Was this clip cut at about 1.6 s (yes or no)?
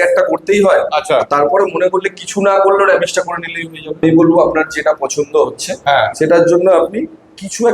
no